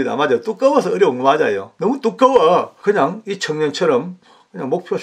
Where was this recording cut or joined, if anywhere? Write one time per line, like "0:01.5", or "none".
0:01.7
0:02.7